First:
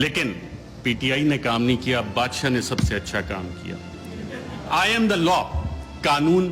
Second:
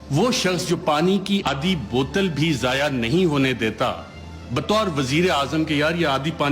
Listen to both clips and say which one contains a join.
second; 1 cut; at 1.5 s

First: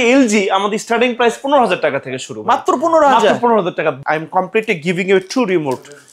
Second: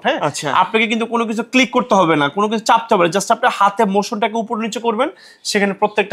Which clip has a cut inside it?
first; 1 cut; at 4.0 s

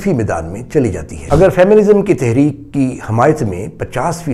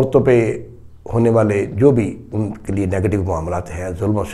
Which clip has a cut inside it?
first; 1 cut; at 1.1 s

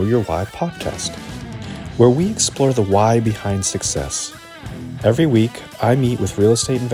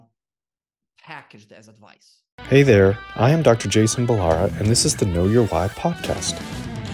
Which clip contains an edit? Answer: second; 1 cut; at 2.4 s

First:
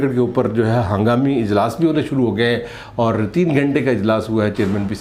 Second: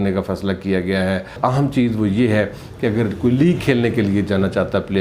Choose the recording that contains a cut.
second; 1 cut; at 1.3 s

